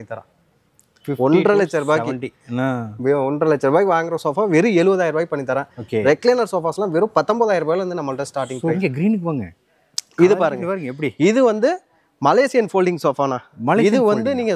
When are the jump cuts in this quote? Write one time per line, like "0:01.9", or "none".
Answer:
0:08.8